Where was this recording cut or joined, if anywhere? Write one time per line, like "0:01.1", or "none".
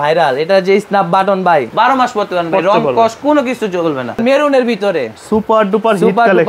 0:01.7
0:04.2